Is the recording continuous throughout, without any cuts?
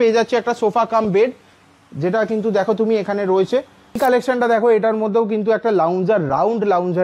no; 1 cut; at 4.0 s

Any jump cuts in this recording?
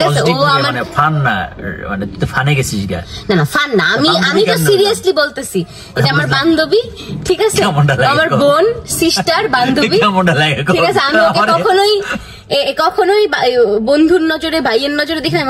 no; 0 cuts

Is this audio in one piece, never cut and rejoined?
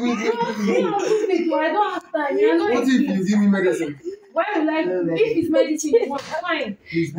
yes; 0 cuts

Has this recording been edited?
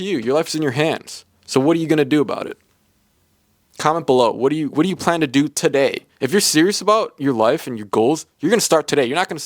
no; 0 cuts

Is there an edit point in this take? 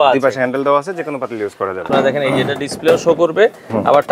yes; 1 cut; at 1.9 s

